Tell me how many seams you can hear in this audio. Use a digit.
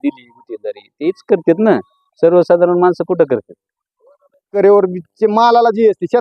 1